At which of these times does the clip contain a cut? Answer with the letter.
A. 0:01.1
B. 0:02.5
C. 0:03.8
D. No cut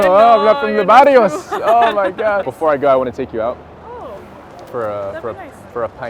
B